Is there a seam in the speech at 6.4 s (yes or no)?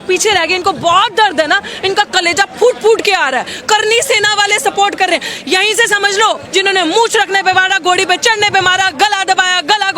yes